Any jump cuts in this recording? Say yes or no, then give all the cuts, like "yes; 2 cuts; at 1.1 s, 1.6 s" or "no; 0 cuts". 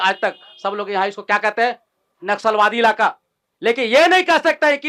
no; 0 cuts